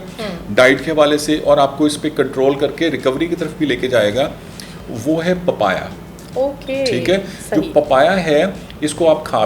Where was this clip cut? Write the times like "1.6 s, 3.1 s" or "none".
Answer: none